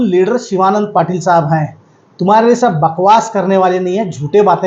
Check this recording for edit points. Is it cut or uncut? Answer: uncut